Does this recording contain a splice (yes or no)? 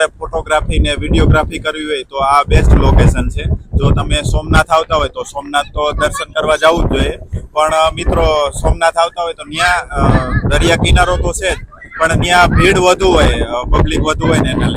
no